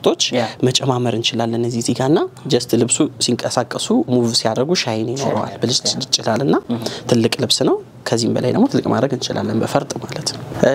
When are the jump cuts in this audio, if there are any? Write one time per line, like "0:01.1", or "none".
none